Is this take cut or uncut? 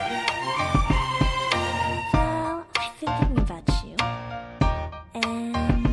cut